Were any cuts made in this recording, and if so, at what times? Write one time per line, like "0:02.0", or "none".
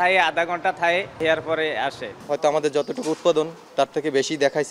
0:01.2
0:02.1
0:03.6